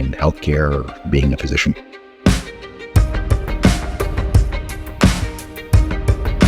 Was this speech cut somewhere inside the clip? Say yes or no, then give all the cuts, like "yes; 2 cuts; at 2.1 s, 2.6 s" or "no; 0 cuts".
yes; 2 cuts; at 0.9 s, 2.1 s